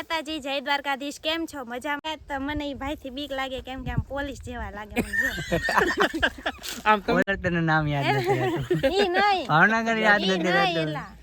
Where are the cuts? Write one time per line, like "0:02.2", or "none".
0:02.0
0:07.2